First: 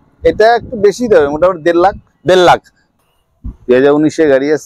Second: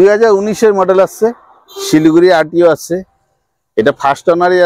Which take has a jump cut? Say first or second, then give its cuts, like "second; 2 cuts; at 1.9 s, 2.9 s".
first; 1 cut; at 2.8 s